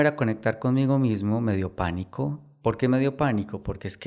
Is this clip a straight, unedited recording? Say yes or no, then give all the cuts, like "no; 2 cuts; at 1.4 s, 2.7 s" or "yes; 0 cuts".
yes; 0 cuts